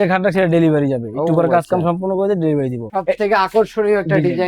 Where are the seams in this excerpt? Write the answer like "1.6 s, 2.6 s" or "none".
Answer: 2.9 s